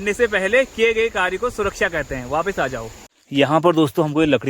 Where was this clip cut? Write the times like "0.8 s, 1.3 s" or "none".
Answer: 3.0 s